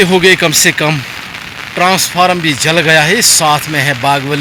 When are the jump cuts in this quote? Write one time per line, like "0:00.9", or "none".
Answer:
none